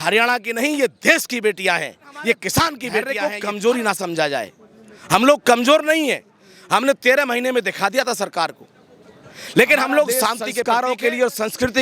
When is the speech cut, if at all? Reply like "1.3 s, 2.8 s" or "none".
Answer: 3.1 s, 10.5 s